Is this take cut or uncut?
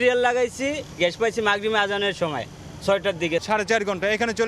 uncut